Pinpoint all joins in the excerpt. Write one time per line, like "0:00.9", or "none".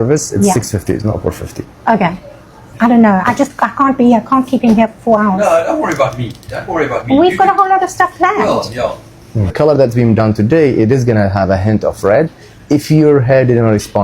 0:02.7
0:09.5